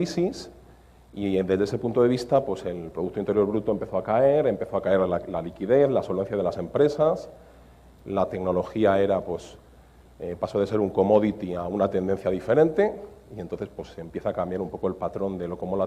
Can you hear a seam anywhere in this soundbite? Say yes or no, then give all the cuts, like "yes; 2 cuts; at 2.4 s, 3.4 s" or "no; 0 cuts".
yes; 1 cut; at 8.8 s